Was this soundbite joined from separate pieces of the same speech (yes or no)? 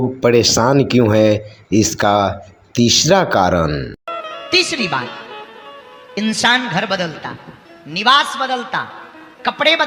no